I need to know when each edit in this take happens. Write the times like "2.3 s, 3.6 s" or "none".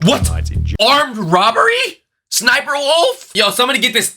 3.3 s